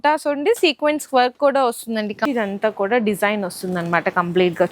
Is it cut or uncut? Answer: cut